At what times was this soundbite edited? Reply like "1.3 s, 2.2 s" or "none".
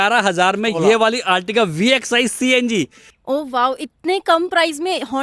3.1 s